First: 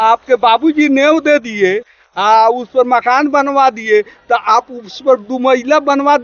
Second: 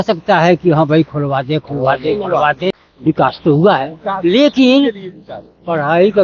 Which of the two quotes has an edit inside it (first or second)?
second